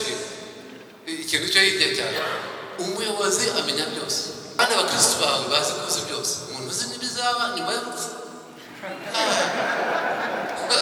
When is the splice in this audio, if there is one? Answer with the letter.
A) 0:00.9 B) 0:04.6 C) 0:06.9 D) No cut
B